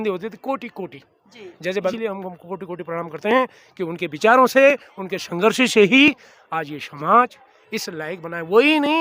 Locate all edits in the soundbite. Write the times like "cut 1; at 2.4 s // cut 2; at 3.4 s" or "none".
cut 1; at 1.9 s